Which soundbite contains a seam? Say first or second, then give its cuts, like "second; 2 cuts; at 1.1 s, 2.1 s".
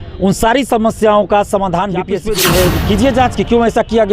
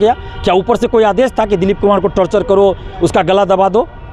first; 1 cut; at 2.2 s